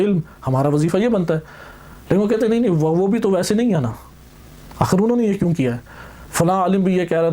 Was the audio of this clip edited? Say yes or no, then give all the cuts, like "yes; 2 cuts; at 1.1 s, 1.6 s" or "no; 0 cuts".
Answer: no; 0 cuts